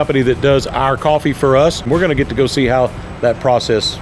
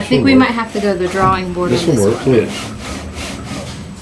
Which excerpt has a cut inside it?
first; 1 cut; at 1.8 s

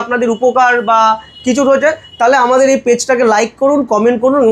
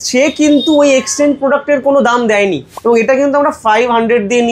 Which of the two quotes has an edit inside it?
second; 1 cut; at 2.7 s

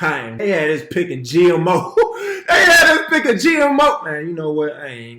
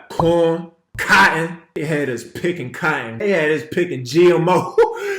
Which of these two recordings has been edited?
second; 2 cuts; at 1.0 s, 1.6 s

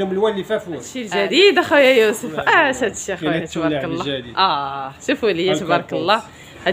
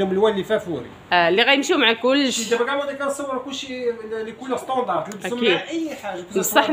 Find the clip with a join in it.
first; 1 cut; at 1.0 s

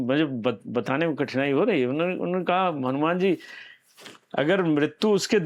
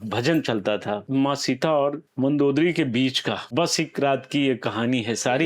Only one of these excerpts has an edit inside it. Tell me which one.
second; 3 cuts; at 1.0 s, 2.0 s, 3.4 s

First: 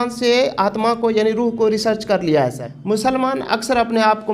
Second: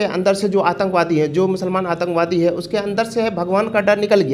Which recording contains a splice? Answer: first; 1 cut; at 2.7 s

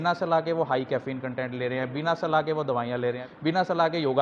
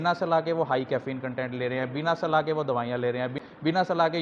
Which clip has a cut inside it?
first; 1 cut; at 3.3 s

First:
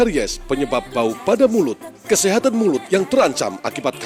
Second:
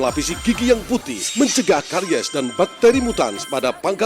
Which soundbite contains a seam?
second; 1 cut; at 1.3 s

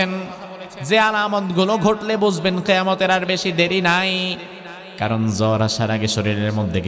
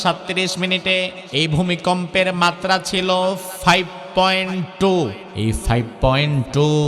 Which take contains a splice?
second; 2 cuts; at 1.2 s, 5.2 s

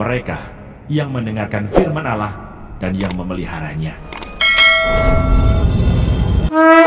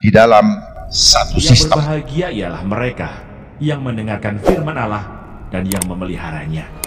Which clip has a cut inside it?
second; 1 cut; at 1.8 s

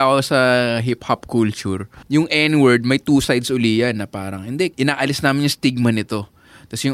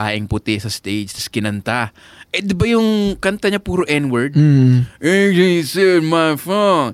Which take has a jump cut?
first; 2 cuts; at 1.9 s, 4.7 s

